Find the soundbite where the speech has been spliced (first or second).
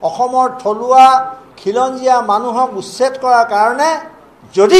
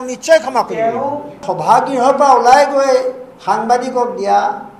second